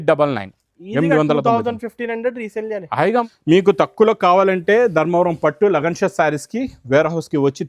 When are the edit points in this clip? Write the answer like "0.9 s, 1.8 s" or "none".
3.3 s

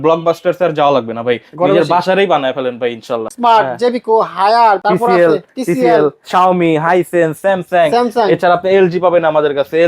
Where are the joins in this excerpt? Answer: 3.3 s, 4.8 s

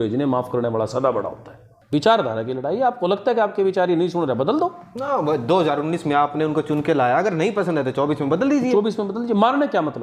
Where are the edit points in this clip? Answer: 1.7 s

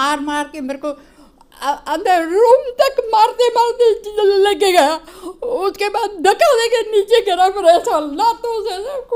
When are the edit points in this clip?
none

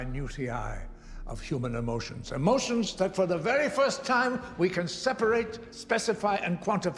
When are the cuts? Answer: none

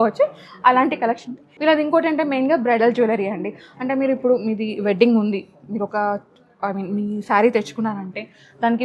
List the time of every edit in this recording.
none

